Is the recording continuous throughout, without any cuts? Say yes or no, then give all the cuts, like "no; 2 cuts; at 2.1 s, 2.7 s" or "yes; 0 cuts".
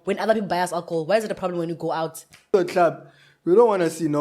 no; 1 cut; at 2.5 s